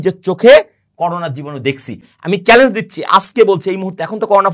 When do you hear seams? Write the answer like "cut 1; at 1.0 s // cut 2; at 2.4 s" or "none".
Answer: cut 1; at 2.1 s